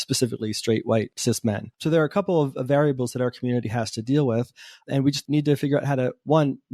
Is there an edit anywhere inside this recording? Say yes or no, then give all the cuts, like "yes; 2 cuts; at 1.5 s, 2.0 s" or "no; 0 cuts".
yes; 2 cuts; at 1.4 s, 5.2 s